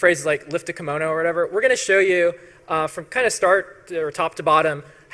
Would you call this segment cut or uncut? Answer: cut